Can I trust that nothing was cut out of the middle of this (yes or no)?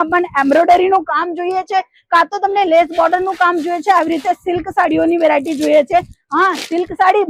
yes